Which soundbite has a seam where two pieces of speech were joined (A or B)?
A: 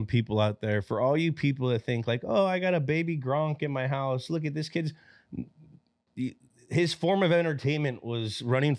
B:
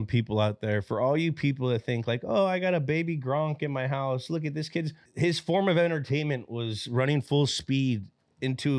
B